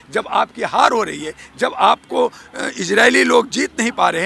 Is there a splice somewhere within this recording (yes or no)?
no